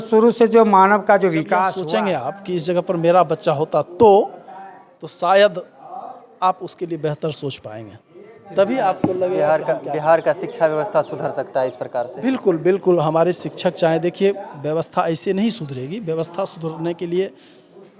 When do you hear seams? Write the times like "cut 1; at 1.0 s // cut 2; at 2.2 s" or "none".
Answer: cut 1; at 1.8 s